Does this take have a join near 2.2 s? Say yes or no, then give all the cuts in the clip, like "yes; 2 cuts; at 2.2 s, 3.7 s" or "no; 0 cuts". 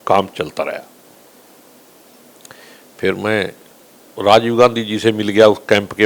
yes; 1 cut; at 2.2 s